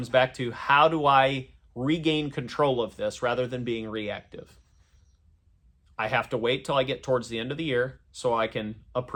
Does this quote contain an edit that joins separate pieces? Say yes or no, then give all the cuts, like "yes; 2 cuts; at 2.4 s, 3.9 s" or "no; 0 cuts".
no; 0 cuts